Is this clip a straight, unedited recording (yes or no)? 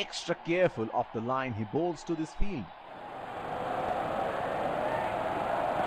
yes